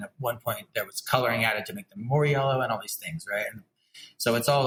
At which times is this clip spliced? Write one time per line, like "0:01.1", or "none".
none